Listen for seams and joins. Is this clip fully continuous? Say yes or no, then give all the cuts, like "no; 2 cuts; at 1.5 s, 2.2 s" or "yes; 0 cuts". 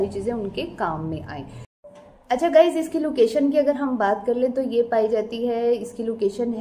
yes; 0 cuts